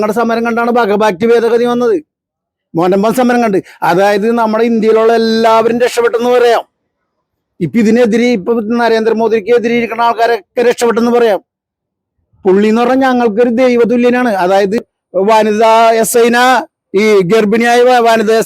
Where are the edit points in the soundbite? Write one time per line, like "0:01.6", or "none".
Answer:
0:14.8